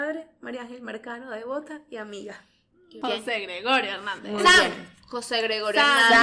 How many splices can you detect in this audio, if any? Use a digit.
1